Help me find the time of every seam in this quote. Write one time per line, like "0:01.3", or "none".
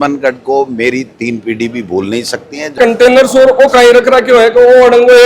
0:02.8